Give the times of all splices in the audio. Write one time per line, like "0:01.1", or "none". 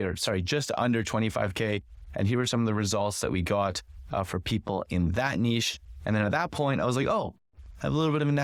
none